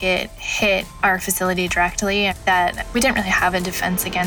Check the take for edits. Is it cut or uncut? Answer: uncut